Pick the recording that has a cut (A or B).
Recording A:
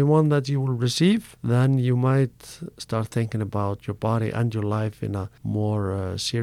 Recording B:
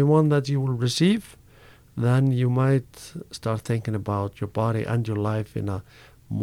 A